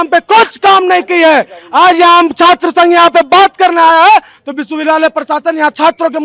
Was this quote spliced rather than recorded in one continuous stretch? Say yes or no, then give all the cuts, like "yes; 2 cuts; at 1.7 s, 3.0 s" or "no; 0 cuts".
no; 0 cuts